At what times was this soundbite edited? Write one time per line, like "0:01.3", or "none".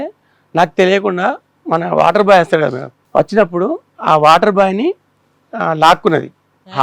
0:02.9